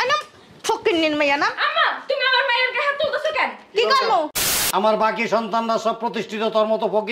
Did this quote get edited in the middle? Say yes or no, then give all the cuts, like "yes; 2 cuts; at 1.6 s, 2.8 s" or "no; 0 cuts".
yes; 1 cut; at 4.6 s